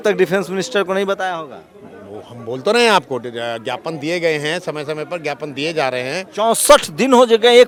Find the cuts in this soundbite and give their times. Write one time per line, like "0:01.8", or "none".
none